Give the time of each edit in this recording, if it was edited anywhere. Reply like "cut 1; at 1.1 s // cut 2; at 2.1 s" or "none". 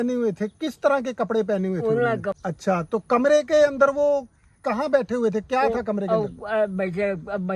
cut 1; at 2.3 s